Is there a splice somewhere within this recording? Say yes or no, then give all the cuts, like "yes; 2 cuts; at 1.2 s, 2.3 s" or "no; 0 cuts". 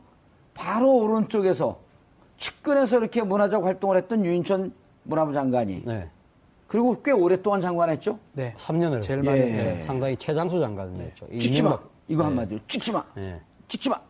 no; 0 cuts